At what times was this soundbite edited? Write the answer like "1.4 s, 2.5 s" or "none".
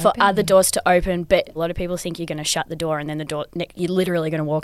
1.5 s